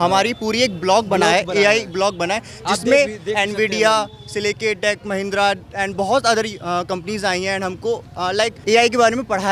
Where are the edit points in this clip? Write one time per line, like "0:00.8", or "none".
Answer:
0:08.6